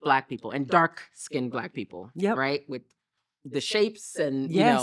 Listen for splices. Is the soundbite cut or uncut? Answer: uncut